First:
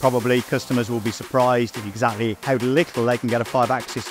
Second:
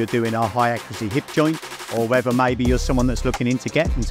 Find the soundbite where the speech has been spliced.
first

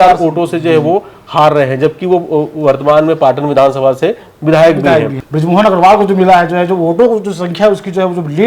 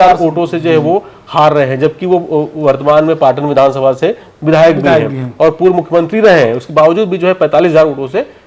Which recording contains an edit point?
first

